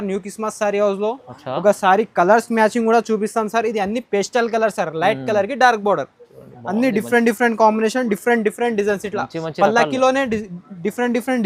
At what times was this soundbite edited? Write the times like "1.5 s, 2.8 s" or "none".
none